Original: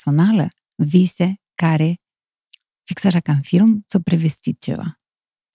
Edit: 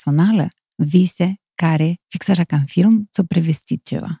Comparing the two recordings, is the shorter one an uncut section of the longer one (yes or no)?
no